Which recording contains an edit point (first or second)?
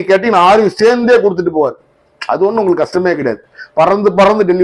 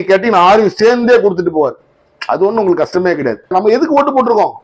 second